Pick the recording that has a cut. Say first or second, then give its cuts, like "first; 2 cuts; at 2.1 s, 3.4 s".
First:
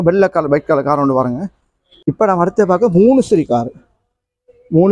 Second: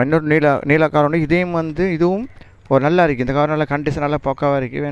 first; 1 cut; at 2.0 s